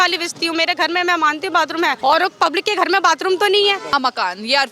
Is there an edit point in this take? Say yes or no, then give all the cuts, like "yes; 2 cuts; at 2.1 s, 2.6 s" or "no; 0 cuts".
yes; 2 cuts; at 2.0 s, 3.9 s